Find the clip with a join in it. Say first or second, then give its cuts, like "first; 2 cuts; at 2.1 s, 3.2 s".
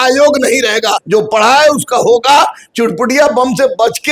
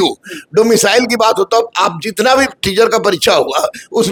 first; 1 cut; at 1.0 s